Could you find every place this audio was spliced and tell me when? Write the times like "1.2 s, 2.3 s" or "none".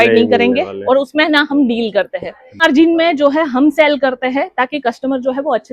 2.6 s